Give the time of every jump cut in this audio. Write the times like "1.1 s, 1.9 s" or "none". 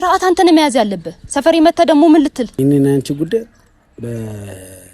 2.6 s